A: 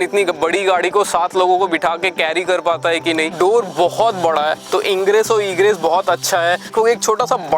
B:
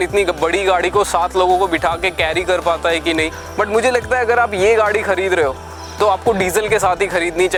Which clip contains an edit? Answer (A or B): A